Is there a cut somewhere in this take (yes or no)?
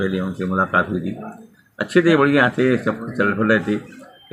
no